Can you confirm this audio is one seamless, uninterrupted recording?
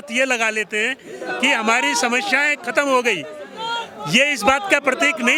yes; 0 cuts

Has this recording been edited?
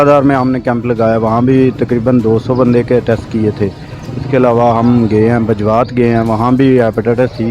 no; 0 cuts

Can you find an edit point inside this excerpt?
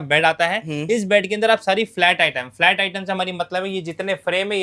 no; 0 cuts

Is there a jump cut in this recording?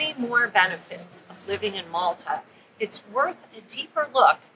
no; 0 cuts

